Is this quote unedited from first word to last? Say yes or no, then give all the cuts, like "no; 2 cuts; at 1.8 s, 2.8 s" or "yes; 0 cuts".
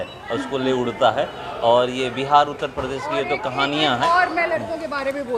yes; 0 cuts